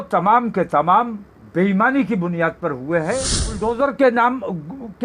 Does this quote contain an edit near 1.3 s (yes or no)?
no